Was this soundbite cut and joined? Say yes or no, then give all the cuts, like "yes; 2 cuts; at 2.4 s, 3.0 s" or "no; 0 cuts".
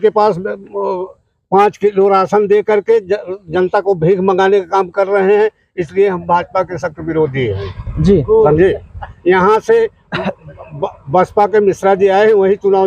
no; 0 cuts